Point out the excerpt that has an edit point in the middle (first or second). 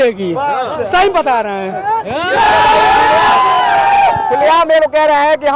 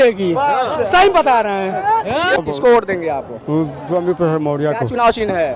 second